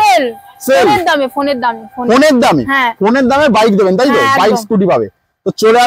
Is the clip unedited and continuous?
yes; 0 cuts

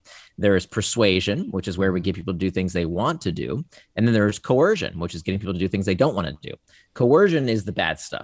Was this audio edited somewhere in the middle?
no; 0 cuts

